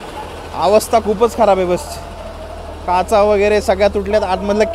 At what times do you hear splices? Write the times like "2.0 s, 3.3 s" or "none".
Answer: none